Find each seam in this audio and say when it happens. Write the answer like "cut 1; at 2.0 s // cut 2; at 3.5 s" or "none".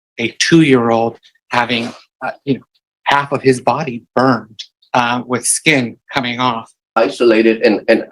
cut 1; at 2.0 s // cut 2; at 6.9 s